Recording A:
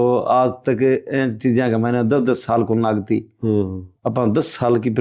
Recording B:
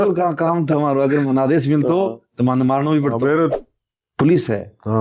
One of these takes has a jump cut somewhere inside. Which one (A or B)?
B